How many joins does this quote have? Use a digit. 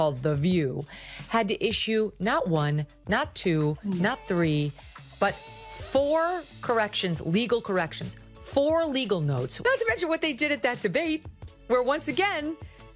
1